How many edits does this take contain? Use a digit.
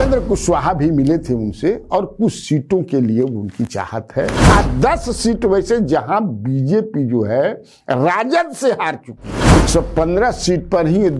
2